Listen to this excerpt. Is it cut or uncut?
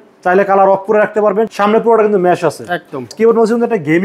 cut